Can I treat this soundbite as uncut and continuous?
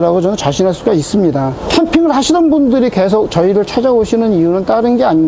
no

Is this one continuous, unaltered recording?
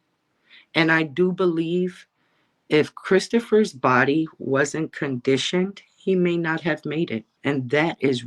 no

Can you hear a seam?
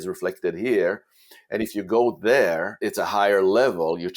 yes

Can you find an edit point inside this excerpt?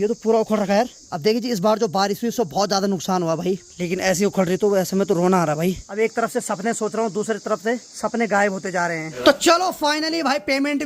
yes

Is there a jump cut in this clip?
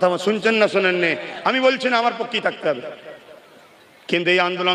no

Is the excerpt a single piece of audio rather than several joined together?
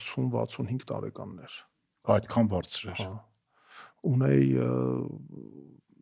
yes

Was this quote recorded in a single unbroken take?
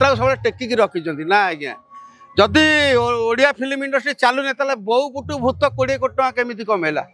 yes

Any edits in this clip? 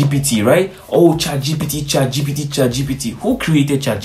no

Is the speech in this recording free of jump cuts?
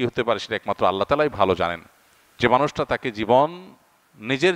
yes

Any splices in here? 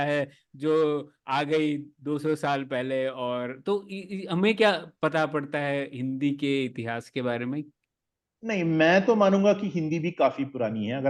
no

